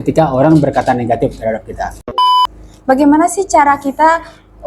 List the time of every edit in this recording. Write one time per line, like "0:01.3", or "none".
0:02.2